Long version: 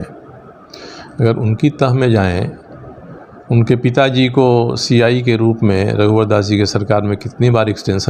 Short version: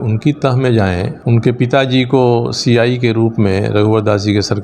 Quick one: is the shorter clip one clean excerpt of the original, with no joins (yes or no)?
no